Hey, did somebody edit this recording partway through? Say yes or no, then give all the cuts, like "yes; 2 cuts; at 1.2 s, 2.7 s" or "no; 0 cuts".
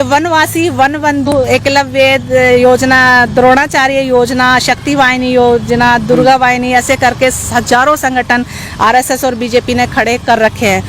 yes; 1 cut; at 1.3 s